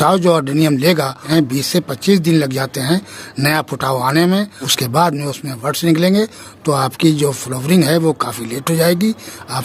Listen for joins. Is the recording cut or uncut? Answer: cut